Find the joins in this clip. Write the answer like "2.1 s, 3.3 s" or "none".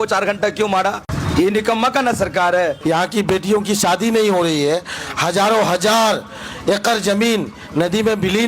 1.1 s, 2.8 s